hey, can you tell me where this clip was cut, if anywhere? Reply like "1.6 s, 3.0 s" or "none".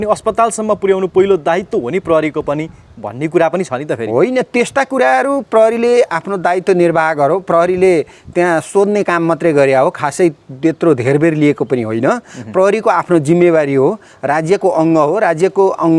none